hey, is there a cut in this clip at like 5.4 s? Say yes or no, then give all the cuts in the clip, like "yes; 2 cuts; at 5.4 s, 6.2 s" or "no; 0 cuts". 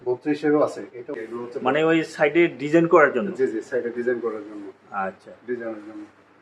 no; 1 cut; at 1.2 s